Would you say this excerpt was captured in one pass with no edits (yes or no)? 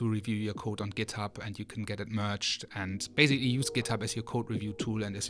yes